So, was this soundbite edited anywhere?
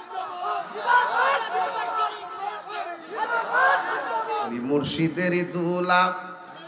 yes; 1 cut; at 4.6 s

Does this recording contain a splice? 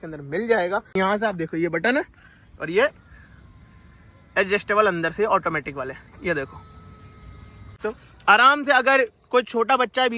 yes; 2 cuts; at 1.0 s, 7.7 s

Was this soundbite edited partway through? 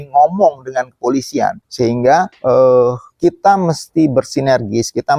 yes; 2 cuts; at 1.6 s, 2.3 s

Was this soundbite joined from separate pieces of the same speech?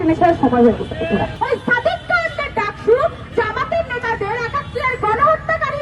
yes; 2 cuts; at 1.3 s, 3.3 s

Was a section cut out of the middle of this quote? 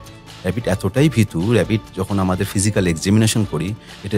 no; 0 cuts

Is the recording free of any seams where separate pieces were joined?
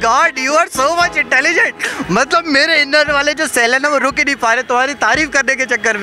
yes; 0 cuts

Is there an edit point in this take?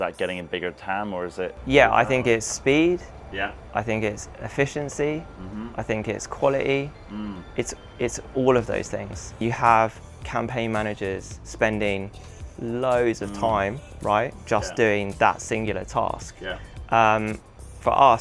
yes; 1 cut; at 9.4 s

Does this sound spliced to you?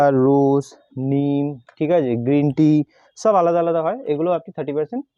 no; 0 cuts

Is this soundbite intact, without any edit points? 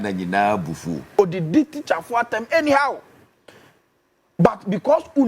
no; 1 cut; at 0.9 s

